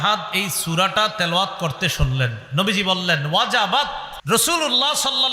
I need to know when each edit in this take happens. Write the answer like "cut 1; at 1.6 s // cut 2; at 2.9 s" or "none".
cut 1; at 4.1 s